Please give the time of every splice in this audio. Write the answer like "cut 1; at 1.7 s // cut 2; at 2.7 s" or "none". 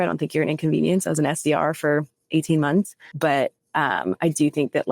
cut 1; at 3.0 s